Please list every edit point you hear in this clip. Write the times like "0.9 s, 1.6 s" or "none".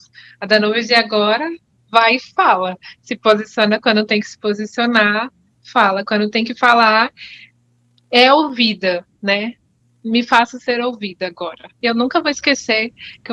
11.8 s

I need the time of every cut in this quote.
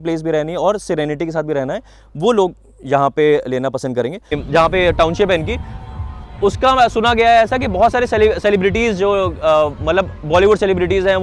4.4 s

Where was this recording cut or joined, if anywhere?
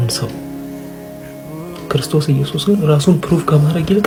none

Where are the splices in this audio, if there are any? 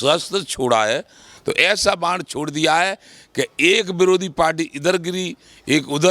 1.3 s

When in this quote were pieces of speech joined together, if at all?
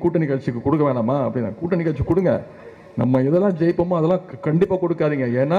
none

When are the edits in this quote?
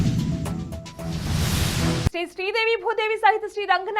2.0 s

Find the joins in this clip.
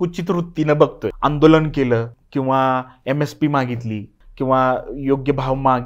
1.1 s, 2.2 s, 4.2 s

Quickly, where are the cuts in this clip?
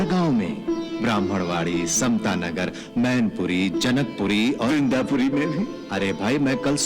5.8 s

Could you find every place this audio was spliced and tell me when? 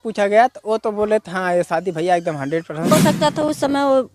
2.9 s

